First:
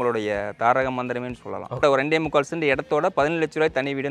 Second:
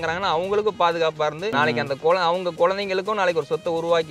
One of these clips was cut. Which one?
first; 1 cut; at 1.8 s

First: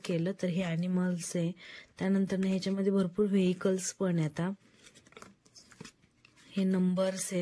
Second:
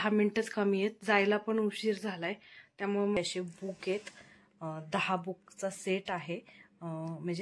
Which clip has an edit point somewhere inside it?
second; 1 cut; at 3.2 s

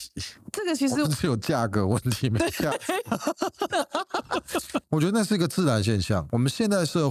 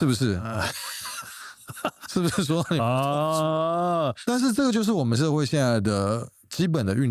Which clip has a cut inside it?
first; 2 cuts; at 4.8 s, 6.3 s

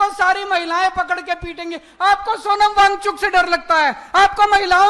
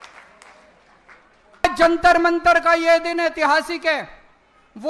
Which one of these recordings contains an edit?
second; 1 cut; at 1.6 s

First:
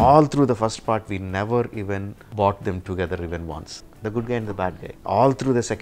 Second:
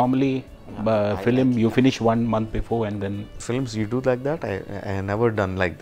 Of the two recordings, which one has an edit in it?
first; 3 cuts; at 2.2 s, 3.8 s, 4.9 s

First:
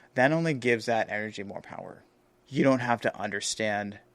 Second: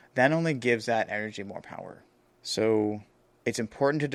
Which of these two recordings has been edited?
first; 1 cut; at 2.4 s

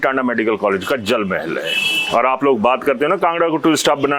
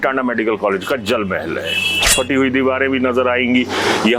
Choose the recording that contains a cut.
second; 1 cut; at 2.1 s

